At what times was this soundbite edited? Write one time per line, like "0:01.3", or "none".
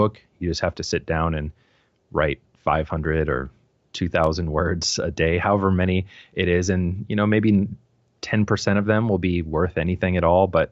none